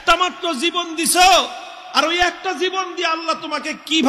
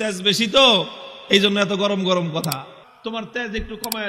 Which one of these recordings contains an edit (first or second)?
second